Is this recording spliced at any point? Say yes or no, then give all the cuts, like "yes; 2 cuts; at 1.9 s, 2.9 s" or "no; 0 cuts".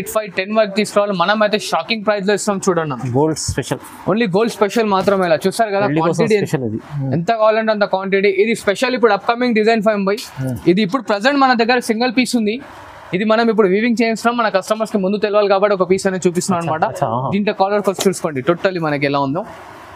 no; 0 cuts